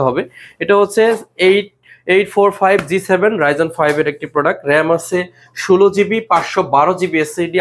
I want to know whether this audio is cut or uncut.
uncut